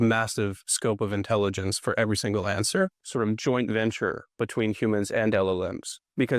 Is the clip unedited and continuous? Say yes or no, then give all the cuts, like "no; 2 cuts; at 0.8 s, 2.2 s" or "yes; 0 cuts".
no; 1 cut; at 3.0 s